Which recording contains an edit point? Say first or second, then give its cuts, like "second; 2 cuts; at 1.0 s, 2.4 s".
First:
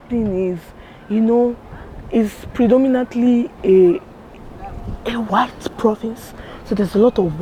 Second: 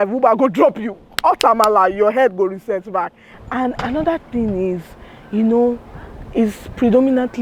second; 1 cut; at 3.3 s